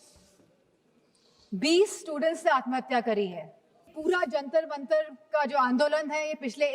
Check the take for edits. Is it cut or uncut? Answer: cut